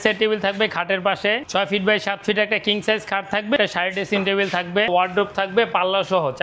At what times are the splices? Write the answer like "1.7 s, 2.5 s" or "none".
1.4 s, 3.6 s, 4.9 s